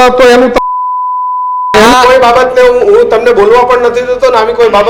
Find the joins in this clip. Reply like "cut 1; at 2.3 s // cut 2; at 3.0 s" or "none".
cut 1; at 1.7 s